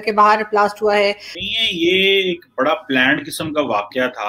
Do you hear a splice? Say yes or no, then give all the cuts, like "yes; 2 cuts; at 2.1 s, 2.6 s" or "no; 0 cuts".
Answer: yes; 1 cut; at 1.3 s